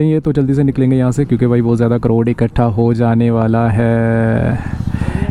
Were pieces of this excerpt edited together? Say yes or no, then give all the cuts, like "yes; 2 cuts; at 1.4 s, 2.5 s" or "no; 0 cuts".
no; 0 cuts